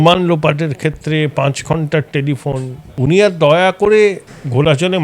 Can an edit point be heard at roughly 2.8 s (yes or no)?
yes